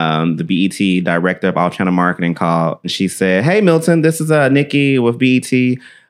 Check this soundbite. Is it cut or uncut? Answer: cut